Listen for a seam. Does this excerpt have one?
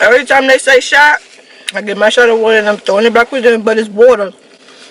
no; 0 cuts

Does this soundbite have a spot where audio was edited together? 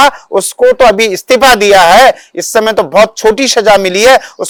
no; 0 cuts

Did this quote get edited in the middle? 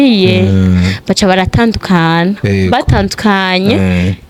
no; 0 cuts

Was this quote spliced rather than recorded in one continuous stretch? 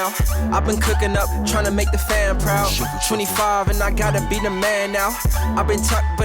no; 0 cuts

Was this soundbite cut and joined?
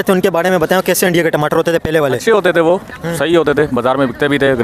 no; 0 cuts

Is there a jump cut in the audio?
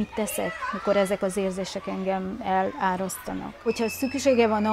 yes; 1 cut; at 3.6 s

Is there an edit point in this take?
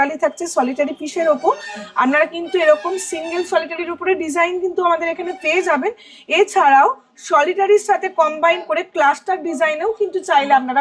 no; 0 cuts

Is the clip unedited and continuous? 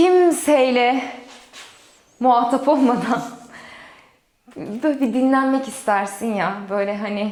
yes; 0 cuts

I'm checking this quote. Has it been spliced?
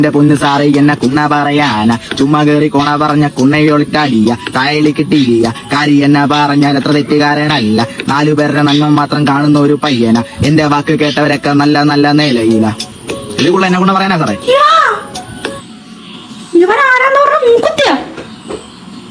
no; 0 cuts

